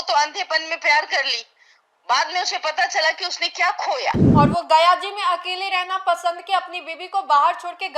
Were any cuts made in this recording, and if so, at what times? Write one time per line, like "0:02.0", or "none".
0:04.2